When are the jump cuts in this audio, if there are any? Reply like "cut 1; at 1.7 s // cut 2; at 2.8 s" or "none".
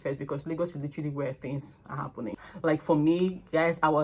cut 1; at 2.4 s

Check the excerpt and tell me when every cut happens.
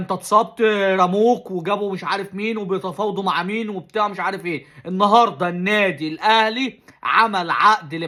none

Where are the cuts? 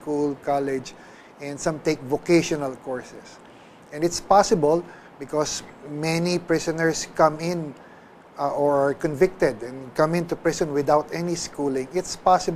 cut 1; at 10.1 s

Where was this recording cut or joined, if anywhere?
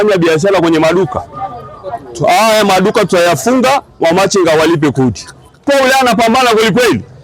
cut 1; at 5.6 s

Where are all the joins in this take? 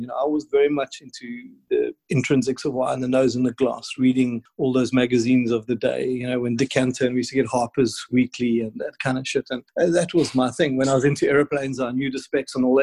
cut 1; at 1.6 s // cut 2; at 4.5 s // cut 3; at 9.6 s

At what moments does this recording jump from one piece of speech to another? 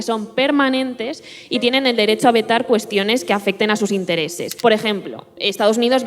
cut 1; at 4.4 s

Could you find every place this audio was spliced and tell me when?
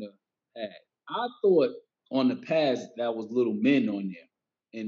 none

